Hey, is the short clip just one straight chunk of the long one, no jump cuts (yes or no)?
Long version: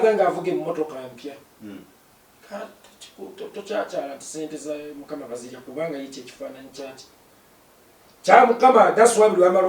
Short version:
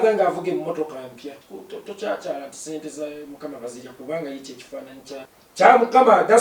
no